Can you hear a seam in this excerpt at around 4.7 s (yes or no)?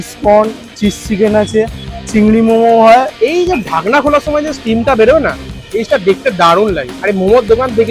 no